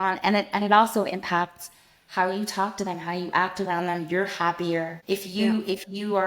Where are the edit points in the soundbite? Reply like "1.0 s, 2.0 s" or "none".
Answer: 5.0 s